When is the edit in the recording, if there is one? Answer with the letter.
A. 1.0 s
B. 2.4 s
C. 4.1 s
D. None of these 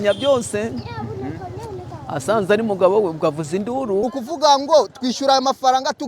C